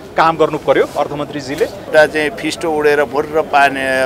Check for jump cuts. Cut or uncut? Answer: cut